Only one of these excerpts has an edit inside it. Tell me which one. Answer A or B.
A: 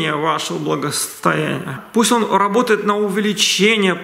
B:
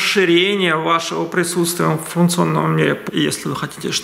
B